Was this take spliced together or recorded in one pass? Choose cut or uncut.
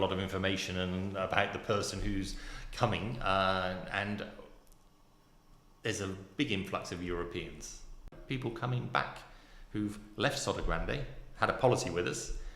cut